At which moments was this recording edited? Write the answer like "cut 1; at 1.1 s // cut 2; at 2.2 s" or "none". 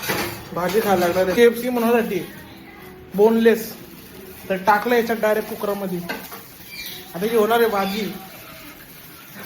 cut 1; at 1.3 s

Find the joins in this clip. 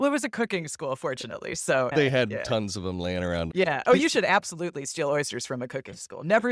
cut 1; at 1.9 s // cut 2; at 3.5 s

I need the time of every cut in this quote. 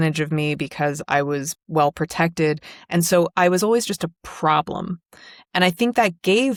none

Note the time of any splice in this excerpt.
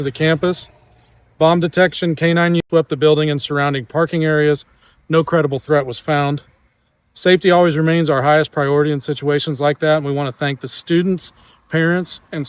cut 1; at 2.6 s

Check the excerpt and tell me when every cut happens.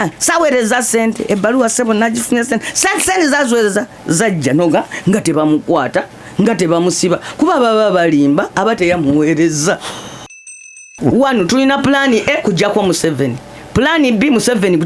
cut 1; at 10.7 s

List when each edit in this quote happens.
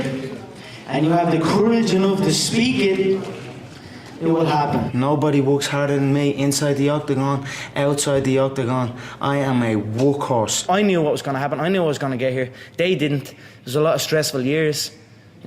cut 1; at 4.9 s // cut 2; at 10.6 s

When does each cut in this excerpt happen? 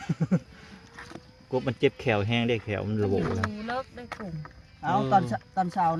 none

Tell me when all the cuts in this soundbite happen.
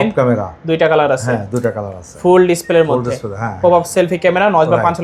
none

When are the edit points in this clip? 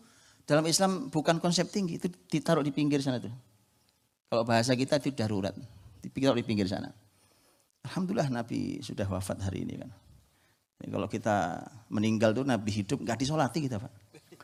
none

